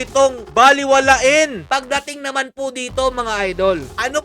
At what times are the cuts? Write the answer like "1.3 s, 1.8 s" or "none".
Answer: 1.6 s